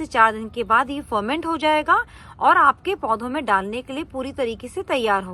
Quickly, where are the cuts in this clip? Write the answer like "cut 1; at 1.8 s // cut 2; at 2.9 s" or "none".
none